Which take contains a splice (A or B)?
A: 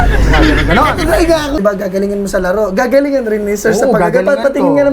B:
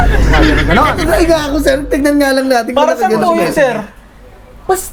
A